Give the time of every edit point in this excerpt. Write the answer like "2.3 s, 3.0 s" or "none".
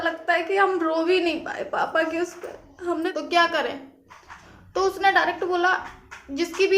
3.1 s